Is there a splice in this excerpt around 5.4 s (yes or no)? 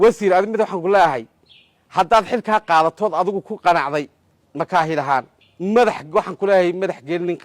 yes